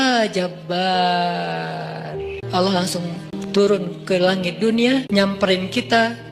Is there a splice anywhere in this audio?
yes; 3 cuts; at 2.4 s, 3.3 s, 5.1 s

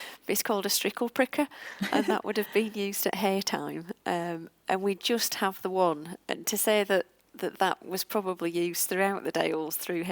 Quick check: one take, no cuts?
yes; 0 cuts

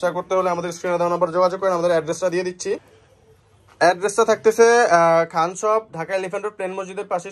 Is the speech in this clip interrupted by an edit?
no; 0 cuts

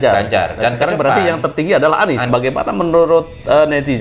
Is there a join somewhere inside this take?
yes; 1 cut; at 2.3 s

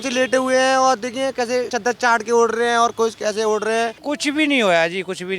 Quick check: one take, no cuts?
no; 2 cuts; at 1.7 s, 4.0 s

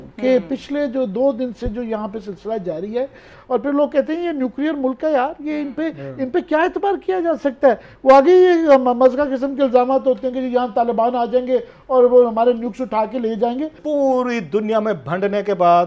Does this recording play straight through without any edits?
no; 2 cuts; at 3.3 s, 13.8 s

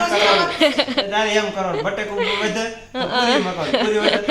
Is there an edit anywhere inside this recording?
no; 0 cuts

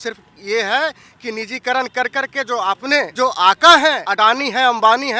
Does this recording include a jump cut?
yes; 2 cuts; at 3.1 s, 4.1 s

